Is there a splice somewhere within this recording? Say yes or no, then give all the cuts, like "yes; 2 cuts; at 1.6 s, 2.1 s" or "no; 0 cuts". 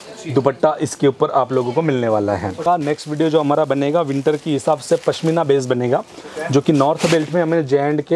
yes; 1 cut; at 2.6 s